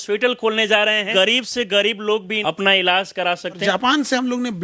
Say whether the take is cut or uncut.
cut